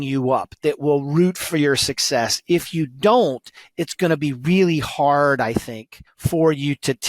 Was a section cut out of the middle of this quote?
no; 0 cuts

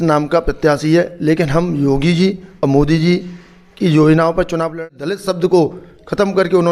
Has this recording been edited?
yes; 1 cut; at 4.8 s

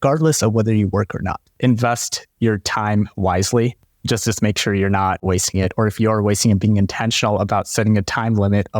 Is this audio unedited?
no; 2 cuts; at 1.4 s, 5.2 s

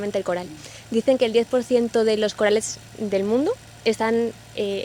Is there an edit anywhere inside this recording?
no; 0 cuts

